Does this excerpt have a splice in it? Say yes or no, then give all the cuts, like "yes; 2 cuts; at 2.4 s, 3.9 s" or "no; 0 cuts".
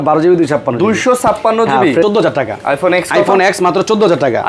yes; 1 cut; at 2.0 s